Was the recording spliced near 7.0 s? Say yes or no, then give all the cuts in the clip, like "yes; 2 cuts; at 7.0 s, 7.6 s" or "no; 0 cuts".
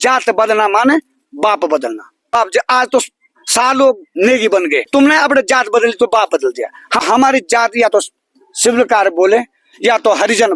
yes; 3 cuts; at 2.3 s, 4.9 s, 7.0 s